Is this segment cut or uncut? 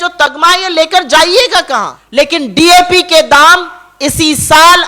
cut